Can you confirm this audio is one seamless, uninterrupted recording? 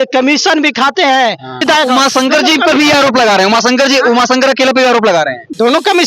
no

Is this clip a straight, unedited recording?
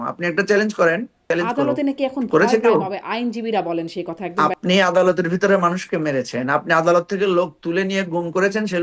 no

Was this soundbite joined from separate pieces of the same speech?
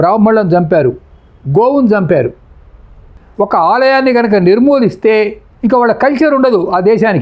yes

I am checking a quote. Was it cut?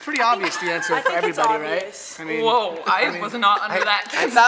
no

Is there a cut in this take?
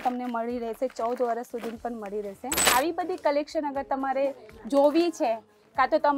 yes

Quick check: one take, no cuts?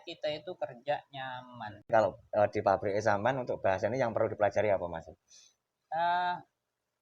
no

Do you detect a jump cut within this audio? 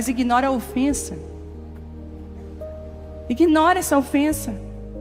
no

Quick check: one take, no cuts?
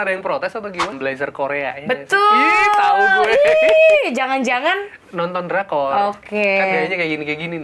no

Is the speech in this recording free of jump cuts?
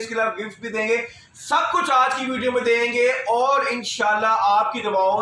yes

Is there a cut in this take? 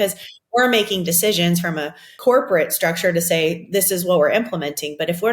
yes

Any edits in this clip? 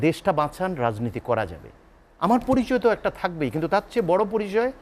no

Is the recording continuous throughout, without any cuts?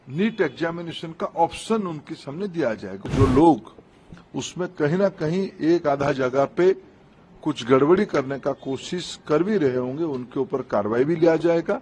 no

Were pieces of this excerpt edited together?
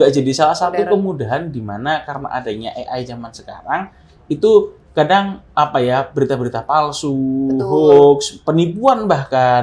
no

